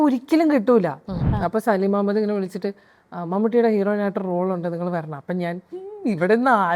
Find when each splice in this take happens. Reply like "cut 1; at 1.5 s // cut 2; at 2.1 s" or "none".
cut 1; at 1.3 s